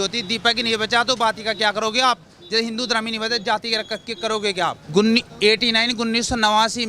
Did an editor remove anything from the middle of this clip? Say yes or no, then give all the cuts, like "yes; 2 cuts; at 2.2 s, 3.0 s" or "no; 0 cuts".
yes; 1 cut; at 4.8 s